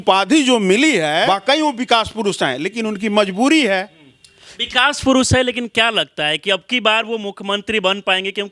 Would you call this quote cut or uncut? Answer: cut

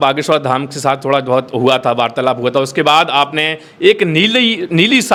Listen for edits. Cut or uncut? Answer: uncut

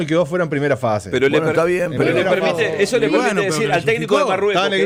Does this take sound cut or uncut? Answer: uncut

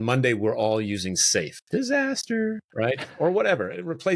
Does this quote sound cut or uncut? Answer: cut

